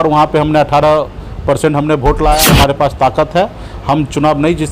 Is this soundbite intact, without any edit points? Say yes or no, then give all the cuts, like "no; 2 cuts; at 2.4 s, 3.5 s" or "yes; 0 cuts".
no; 1 cut; at 2.4 s